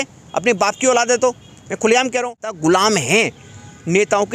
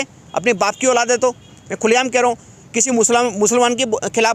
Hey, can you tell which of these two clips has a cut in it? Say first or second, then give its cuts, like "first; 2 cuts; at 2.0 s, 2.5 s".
first; 1 cut; at 2.6 s